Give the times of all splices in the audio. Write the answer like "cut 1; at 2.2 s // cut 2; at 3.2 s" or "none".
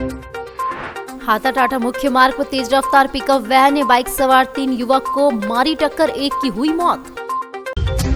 none

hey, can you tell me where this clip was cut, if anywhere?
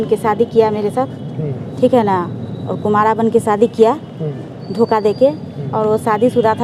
none

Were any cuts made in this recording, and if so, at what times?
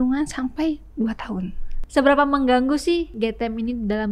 cut 1; at 1.8 s // cut 2; at 3.1 s

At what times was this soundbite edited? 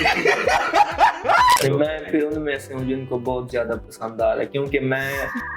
cut 1; at 1.6 s

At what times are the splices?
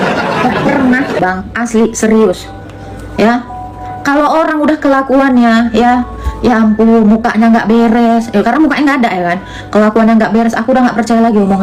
none

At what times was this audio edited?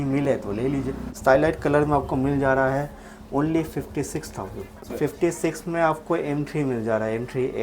cut 1; at 1.0 s // cut 2; at 4.9 s

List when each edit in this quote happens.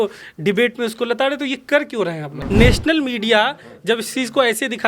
cut 1; at 2.3 s

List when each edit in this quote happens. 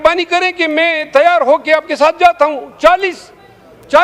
none

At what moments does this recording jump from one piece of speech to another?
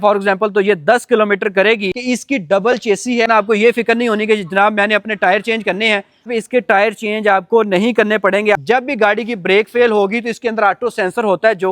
cut 1; at 1.9 s // cut 2; at 3.5 s // cut 3; at 6.3 s // cut 4; at 8.6 s

